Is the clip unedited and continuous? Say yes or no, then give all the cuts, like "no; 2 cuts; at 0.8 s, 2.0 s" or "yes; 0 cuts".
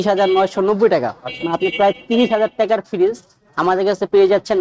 yes; 0 cuts